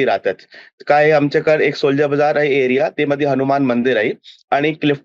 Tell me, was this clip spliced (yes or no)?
no